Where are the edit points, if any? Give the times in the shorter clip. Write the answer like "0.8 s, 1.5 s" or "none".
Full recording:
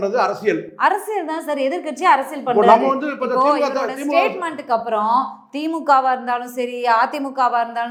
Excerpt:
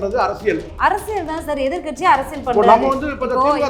none